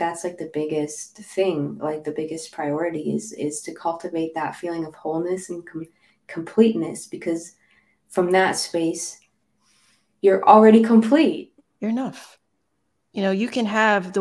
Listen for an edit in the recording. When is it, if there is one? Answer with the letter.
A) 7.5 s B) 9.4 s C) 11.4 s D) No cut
C